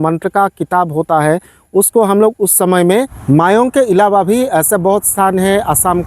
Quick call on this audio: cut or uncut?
cut